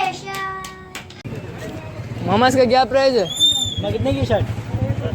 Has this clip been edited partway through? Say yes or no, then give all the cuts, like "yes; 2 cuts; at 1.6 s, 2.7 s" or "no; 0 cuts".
yes; 1 cut; at 1.2 s